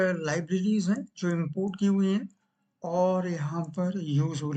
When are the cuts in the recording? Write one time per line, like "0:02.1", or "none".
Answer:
none